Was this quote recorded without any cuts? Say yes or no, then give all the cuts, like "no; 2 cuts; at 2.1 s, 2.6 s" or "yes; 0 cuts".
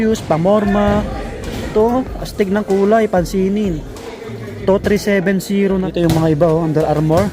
no; 1 cut; at 5.9 s